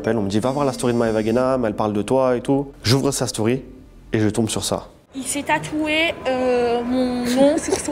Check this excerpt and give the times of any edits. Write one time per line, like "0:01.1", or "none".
none